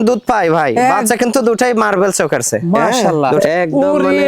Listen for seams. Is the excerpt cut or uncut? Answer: cut